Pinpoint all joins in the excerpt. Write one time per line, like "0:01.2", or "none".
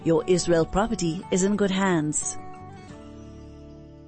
0:02.2